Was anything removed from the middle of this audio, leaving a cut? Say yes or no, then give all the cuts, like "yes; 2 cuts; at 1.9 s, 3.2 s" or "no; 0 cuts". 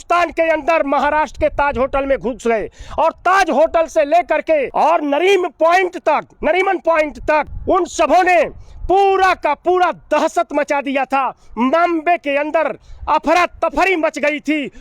yes; 2 cuts; at 4.7 s, 7.5 s